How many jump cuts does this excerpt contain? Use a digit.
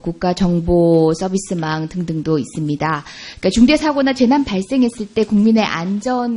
1